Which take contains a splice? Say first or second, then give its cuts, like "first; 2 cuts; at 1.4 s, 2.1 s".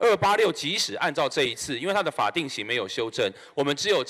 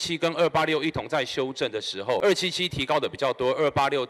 second; 1 cut; at 2.2 s